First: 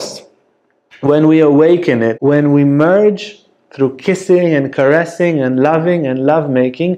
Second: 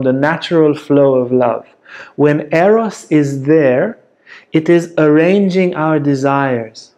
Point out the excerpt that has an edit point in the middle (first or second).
first